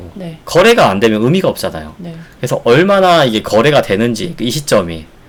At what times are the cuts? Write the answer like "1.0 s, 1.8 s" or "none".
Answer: none